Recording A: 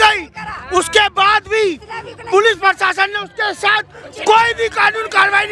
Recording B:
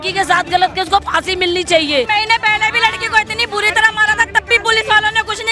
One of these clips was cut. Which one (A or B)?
B